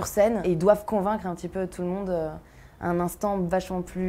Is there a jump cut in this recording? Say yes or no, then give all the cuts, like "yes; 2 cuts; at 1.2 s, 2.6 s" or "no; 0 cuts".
no; 0 cuts